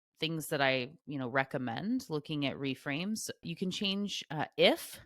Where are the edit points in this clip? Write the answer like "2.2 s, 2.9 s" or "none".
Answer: 3.4 s